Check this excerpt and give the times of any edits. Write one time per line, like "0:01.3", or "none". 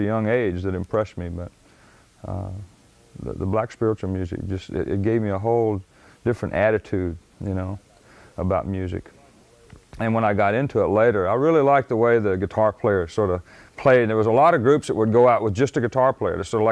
0:14.7